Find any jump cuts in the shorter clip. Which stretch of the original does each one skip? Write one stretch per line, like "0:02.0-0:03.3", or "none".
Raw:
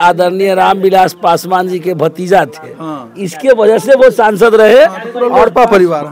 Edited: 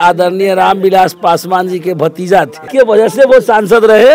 0:02.6-0:03.3